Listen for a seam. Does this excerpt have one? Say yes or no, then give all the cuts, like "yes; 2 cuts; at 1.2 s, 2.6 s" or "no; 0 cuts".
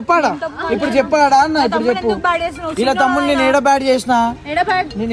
no; 0 cuts